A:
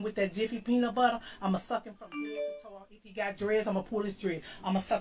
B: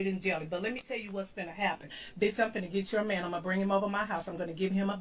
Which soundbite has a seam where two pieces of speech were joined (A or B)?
B